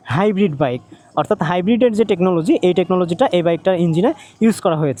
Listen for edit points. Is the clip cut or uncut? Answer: uncut